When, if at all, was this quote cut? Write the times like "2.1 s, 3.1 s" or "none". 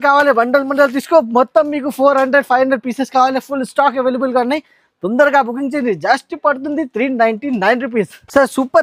none